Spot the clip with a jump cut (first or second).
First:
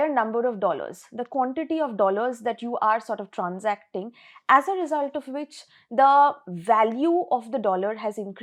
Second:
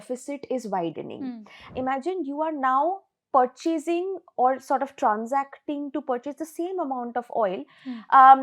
second